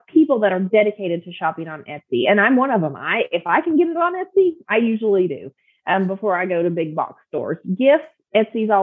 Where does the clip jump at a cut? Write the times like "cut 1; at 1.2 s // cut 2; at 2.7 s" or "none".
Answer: none